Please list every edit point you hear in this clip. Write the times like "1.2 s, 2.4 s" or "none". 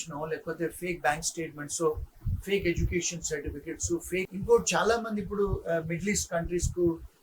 4.3 s